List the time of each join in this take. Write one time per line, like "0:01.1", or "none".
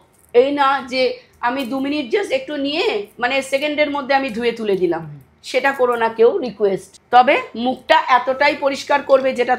0:06.9